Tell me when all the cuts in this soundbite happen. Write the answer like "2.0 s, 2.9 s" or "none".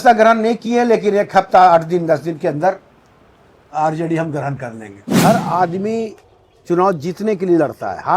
5.1 s